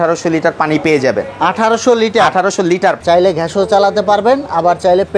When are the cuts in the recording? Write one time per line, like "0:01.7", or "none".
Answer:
0:03.0